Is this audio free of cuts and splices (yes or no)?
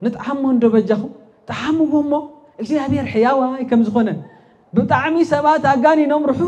yes